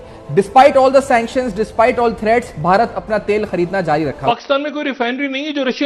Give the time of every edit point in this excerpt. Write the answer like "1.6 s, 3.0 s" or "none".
4.2 s